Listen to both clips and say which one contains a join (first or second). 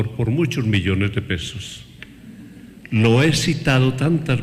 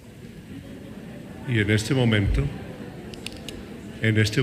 second